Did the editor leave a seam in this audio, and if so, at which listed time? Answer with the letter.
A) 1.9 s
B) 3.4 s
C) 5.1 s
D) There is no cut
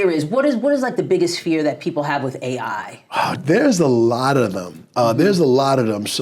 B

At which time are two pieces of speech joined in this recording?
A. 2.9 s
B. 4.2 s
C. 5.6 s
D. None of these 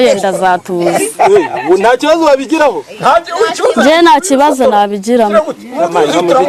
D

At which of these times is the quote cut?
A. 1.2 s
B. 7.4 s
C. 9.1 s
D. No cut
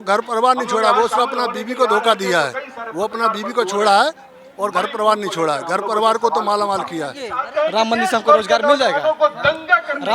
B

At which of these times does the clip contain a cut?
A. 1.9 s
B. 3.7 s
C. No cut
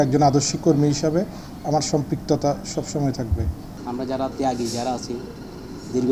B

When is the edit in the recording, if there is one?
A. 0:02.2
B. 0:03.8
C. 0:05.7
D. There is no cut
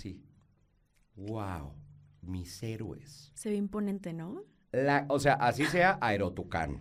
D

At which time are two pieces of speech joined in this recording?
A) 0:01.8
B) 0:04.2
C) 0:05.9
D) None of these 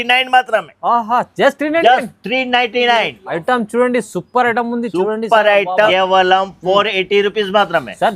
C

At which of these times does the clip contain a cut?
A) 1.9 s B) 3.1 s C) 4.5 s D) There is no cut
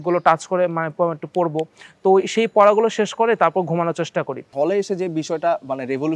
C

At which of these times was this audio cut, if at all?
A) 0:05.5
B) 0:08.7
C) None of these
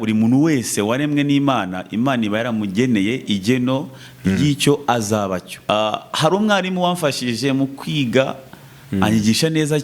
A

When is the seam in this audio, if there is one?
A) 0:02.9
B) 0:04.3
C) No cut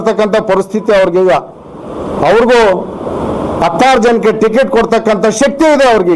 C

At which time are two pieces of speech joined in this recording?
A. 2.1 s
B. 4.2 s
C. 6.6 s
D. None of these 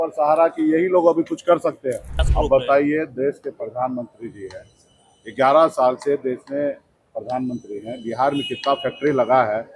A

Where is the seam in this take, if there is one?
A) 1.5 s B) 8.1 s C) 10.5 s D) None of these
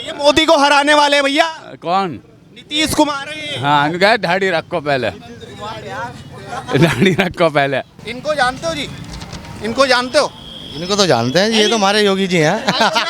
B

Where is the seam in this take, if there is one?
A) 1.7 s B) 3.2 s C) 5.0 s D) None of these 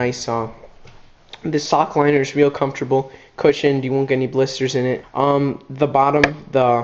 C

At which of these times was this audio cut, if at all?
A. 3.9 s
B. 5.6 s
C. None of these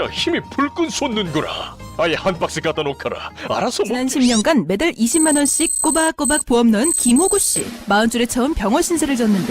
A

